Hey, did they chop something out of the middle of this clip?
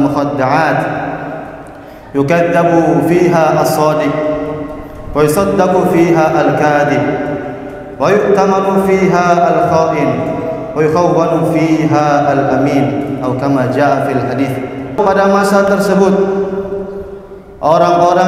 yes; 1 cut; at 15.0 s

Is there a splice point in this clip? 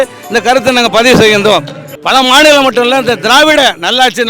yes; 1 cut; at 2.0 s

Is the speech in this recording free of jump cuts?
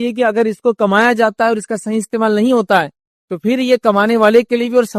yes; 0 cuts

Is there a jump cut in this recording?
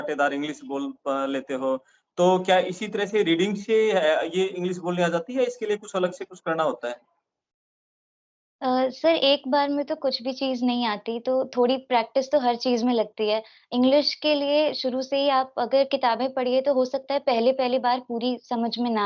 no; 0 cuts

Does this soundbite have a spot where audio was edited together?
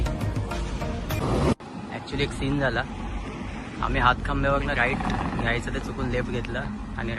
yes; 1 cut; at 1.2 s

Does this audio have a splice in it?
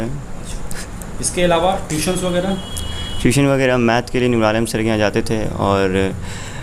no; 0 cuts

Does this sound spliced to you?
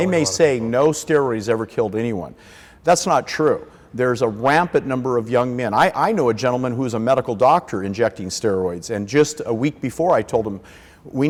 no; 0 cuts

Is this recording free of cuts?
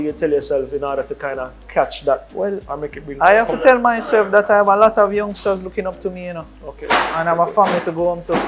yes; 0 cuts

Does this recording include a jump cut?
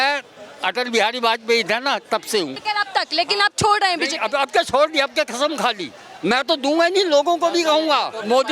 yes; 1 cut; at 2.6 s

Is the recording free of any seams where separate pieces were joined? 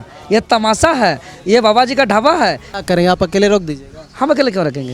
no; 1 cut; at 2.7 s

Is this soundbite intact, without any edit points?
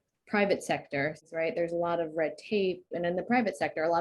no; 2 cuts; at 1.2 s, 2.9 s

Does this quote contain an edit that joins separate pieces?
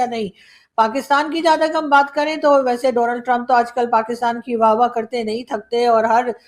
no; 0 cuts

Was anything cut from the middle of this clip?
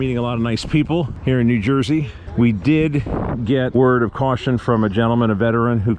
yes; 3 cuts; at 1.1 s, 2.2 s, 3.7 s

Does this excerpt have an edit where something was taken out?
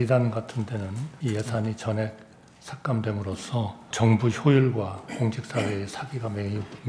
yes; 2 cuts; at 1.1 s, 3.9 s

